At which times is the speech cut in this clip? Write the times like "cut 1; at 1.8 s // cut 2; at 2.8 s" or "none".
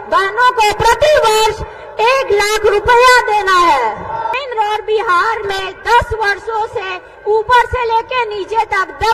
cut 1; at 4.3 s